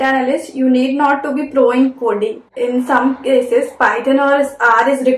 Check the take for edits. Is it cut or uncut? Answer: uncut